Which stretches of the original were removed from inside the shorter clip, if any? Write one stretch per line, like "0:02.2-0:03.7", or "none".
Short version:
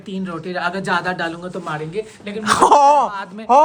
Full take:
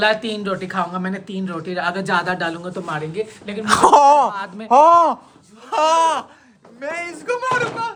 none